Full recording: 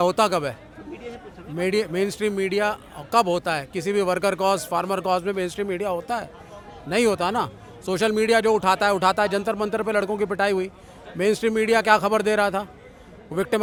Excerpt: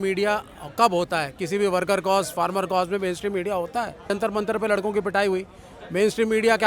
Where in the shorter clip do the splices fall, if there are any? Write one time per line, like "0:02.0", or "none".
0:04.1